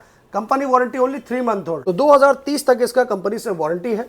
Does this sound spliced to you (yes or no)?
yes